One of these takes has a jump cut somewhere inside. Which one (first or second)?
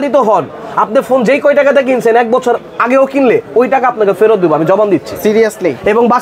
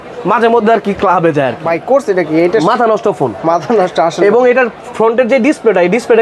second